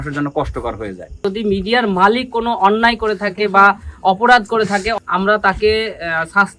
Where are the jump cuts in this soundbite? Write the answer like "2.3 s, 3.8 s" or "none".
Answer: 1.2 s, 4.9 s